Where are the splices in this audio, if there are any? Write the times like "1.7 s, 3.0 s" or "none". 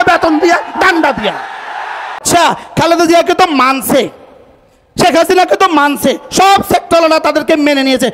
2.2 s